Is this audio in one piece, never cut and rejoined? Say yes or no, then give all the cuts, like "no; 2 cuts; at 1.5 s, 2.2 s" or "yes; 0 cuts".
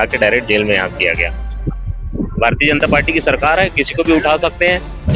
no; 1 cut; at 1.6 s